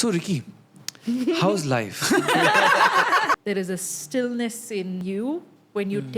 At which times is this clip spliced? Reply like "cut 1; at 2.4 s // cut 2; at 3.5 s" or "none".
cut 1; at 3.4 s // cut 2; at 5.0 s